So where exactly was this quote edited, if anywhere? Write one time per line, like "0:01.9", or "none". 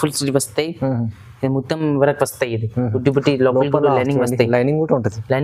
none